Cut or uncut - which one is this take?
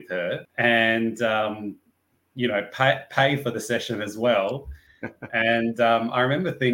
uncut